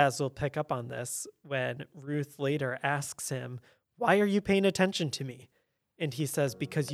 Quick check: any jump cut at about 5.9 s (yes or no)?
no